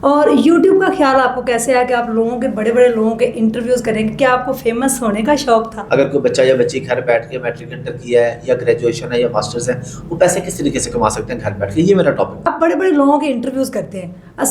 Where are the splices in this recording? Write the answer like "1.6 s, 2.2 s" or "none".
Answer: 5.8 s, 12.5 s